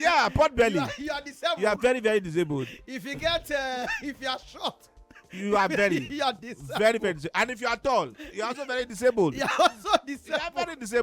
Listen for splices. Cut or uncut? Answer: uncut